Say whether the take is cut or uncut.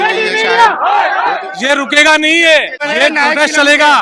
cut